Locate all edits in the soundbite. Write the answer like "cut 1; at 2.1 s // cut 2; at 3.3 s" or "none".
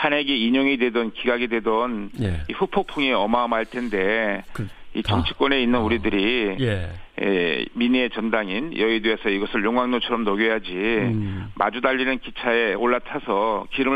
cut 1; at 5.7 s